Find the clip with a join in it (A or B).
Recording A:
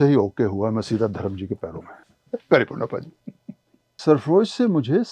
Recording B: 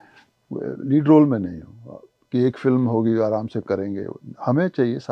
A